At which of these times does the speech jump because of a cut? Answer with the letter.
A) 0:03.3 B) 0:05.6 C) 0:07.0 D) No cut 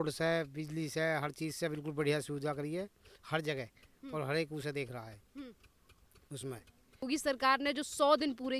C